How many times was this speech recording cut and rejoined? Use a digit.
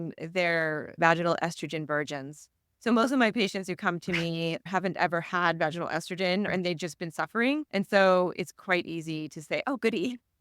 4